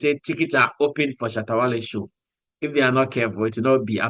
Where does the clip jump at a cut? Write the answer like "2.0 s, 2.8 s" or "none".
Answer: none